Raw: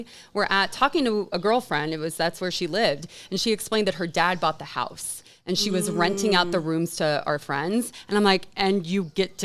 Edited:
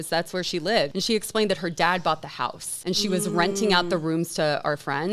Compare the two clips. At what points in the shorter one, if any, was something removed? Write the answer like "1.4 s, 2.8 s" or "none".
1.0 s, 2.7 s